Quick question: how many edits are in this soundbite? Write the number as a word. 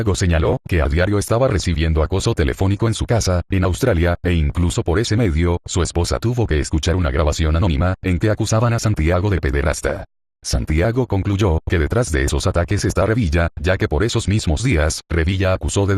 one